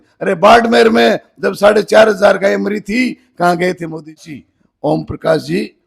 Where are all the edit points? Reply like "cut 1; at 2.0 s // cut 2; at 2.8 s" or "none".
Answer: cut 1; at 4.2 s